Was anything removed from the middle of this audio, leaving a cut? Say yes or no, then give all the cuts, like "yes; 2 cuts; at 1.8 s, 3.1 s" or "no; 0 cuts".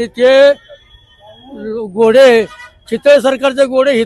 no; 0 cuts